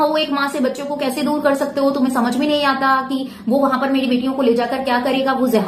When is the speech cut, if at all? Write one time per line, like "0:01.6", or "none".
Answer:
none